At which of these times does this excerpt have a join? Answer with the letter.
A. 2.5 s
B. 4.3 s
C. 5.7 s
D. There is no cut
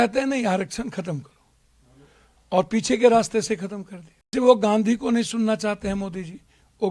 B